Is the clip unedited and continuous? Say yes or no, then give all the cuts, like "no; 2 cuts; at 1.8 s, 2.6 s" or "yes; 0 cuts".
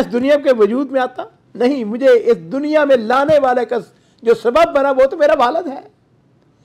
yes; 0 cuts